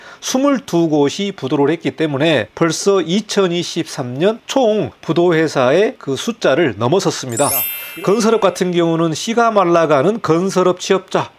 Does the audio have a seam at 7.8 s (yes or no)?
yes